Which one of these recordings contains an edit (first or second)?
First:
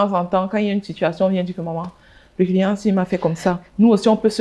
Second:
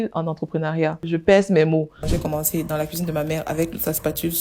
second